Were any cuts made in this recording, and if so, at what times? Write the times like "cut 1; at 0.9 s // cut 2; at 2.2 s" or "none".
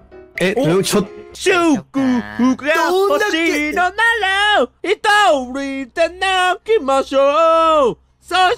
cut 1; at 1.2 s